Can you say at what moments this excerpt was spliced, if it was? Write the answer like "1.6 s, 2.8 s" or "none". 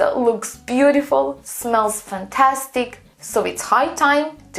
none